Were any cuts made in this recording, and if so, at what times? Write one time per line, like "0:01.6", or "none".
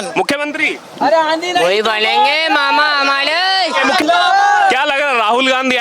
0:04.0